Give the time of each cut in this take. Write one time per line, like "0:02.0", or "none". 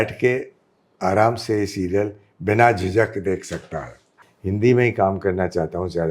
0:04.1